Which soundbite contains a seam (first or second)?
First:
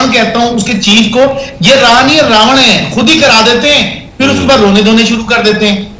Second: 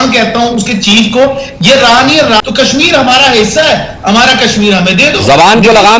second